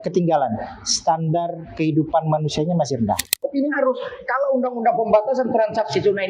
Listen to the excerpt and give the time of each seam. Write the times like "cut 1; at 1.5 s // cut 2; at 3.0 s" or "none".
cut 1; at 3.4 s